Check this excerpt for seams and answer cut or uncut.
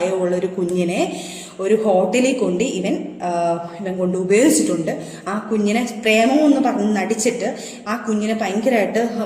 uncut